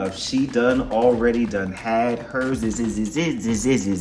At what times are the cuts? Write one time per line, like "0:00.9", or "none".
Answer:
none